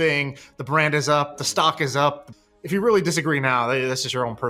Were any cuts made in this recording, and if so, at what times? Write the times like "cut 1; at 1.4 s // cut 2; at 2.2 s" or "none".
none

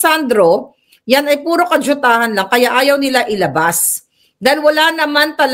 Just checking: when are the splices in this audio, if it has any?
none

